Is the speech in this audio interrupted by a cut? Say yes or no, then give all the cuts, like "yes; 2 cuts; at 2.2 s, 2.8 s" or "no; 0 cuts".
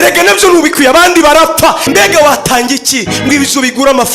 yes; 1 cut; at 1.8 s